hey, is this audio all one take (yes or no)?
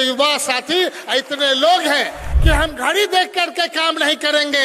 no